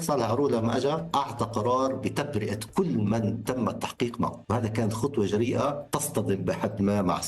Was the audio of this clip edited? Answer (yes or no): yes